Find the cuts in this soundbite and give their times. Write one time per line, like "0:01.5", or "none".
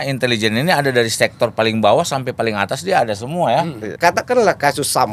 0:03.9